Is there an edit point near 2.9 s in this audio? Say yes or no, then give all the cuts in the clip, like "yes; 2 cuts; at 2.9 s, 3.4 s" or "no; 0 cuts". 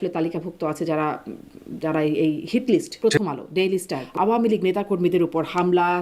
yes; 2 cuts; at 2.9 s, 4.0 s